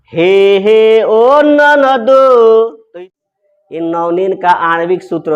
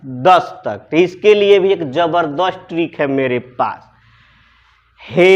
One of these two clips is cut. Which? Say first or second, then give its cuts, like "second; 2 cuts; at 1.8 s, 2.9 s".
first; 1 cut; at 3.0 s